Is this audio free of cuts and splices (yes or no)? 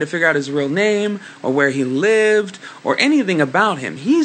no